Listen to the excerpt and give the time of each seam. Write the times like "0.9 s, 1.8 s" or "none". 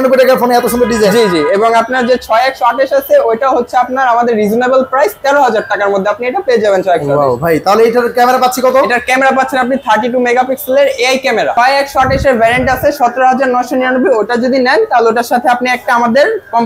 11.5 s

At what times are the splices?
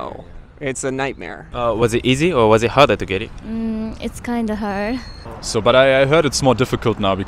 1.4 s, 5.2 s

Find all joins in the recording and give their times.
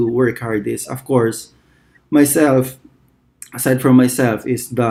none

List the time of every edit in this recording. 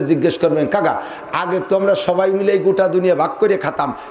none

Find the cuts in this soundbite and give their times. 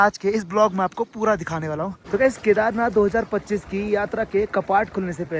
1.9 s

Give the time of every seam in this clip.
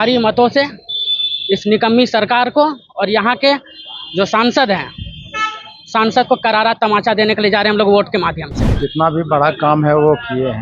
8.6 s

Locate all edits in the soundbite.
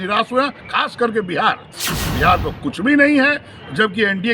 1.7 s

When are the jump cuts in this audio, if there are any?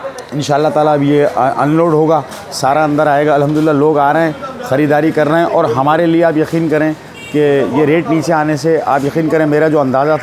none

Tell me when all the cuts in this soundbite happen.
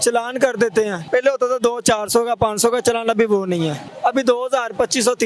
1.0 s, 3.9 s

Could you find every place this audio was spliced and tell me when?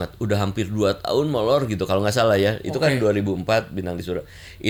none

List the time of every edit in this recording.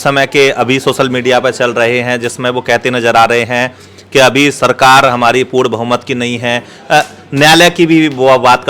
none

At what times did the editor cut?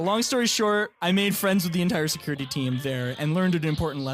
0.9 s

